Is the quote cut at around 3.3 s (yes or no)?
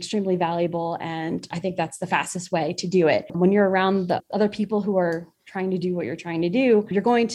yes